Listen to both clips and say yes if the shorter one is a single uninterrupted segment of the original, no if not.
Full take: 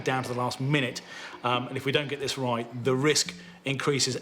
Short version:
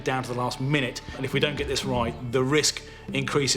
no